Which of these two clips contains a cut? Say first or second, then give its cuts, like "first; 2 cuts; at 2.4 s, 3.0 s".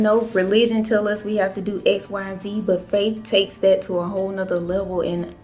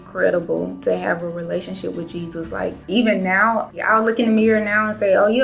second; 2 cuts; at 2.8 s, 3.8 s